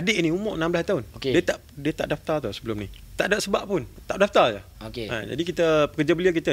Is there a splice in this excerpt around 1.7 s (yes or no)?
no